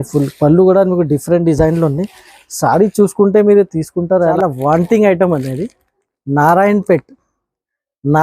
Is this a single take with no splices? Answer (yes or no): no